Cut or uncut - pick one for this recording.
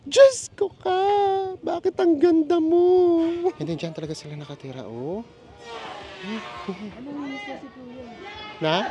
cut